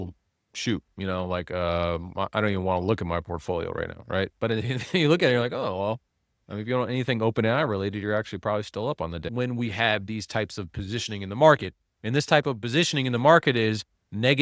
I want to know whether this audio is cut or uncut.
cut